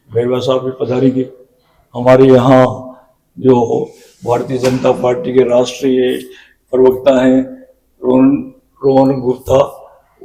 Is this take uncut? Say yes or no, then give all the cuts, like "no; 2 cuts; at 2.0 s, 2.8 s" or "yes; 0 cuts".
yes; 0 cuts